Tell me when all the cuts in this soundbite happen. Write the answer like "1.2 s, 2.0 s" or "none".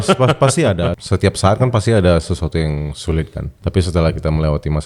1.0 s, 3.5 s